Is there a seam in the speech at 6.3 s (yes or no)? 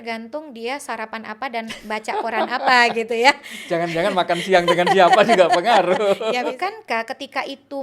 yes